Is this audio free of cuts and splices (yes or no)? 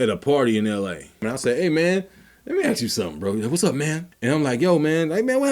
no